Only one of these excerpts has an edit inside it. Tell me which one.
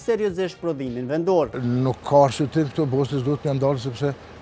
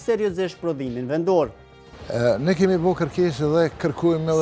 first; 1 cut; at 1.6 s

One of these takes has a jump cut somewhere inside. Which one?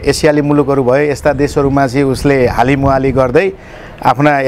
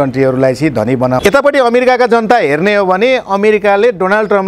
second; 1 cut; at 1.2 s

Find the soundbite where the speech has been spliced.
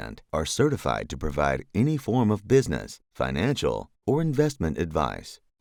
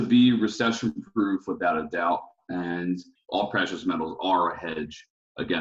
second; 1 cut; at 3.1 s

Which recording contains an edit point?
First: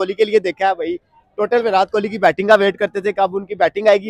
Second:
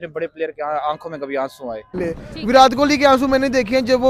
second; 1 cut; at 2.0 s

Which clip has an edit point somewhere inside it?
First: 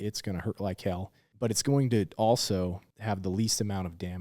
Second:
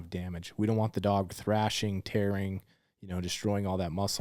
first; 2 cuts; at 1.2 s, 2.9 s

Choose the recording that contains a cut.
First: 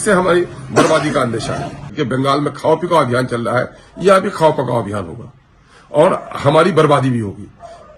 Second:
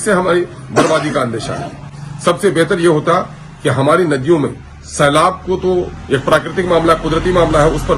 first; 1 cut; at 1.9 s

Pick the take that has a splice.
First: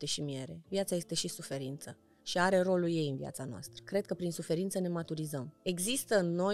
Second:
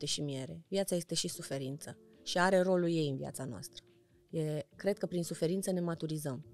first; 2 cuts; at 3.8 s, 5.5 s

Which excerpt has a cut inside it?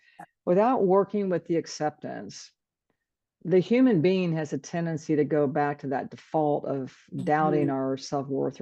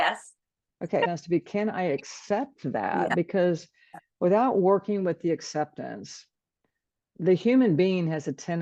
second; 1 cut; at 1.1 s

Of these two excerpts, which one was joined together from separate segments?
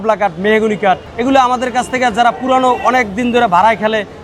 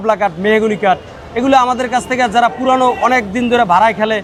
first; 1 cut; at 1.1 s

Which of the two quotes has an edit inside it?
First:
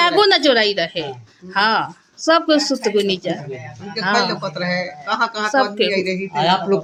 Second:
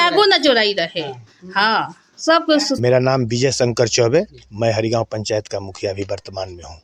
second; 1 cut; at 3.0 s

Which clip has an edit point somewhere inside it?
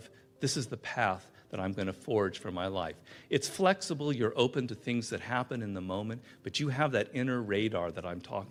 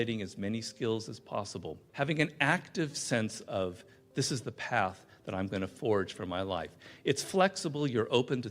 second; 1 cut; at 1.8 s

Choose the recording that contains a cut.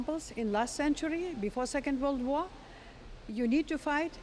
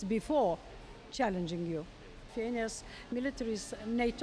second; 1 cut; at 2.3 s

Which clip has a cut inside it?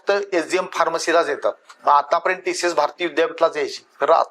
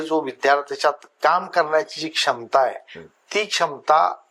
first; 1 cut; at 1.7 s

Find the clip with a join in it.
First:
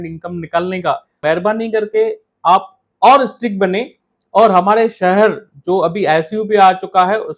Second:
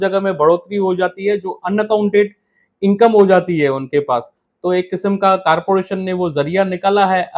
first; 1 cut; at 1.2 s

